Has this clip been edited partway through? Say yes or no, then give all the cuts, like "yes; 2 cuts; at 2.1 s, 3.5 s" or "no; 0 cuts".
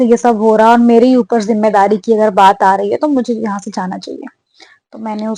no; 0 cuts